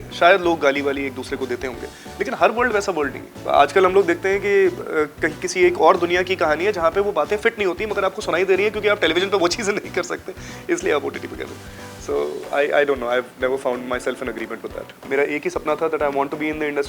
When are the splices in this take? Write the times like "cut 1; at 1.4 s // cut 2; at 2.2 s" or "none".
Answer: cut 1; at 3.3 s // cut 2; at 15.0 s

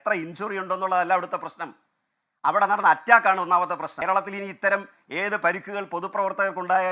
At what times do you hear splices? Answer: cut 1; at 3.9 s

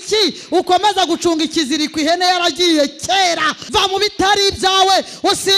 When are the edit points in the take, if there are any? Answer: cut 1; at 3.6 s

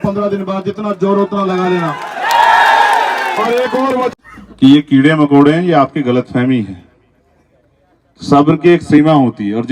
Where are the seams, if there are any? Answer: cut 1; at 4.1 s

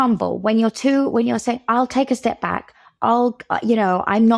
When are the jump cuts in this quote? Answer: none

